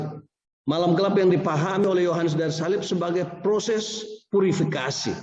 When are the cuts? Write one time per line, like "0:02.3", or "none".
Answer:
none